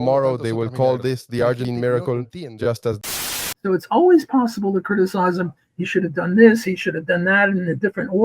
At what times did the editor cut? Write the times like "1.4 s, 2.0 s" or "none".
1.6 s, 3.1 s